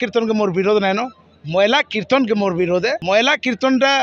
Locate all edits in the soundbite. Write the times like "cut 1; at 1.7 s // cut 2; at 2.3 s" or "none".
cut 1; at 3.0 s